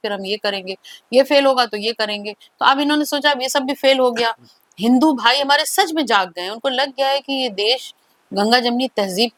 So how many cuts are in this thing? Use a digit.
0